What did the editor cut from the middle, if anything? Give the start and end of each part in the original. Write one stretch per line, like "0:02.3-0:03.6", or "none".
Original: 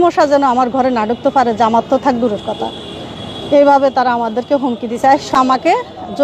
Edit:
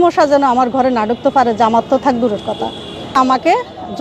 0:03.1-0:05.3